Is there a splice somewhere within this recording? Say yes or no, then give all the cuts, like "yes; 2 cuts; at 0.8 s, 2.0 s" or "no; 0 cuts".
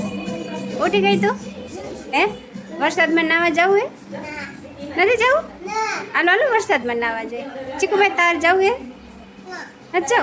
no; 0 cuts